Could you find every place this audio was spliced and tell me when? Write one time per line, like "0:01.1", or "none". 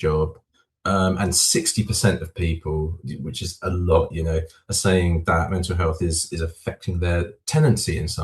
0:07.3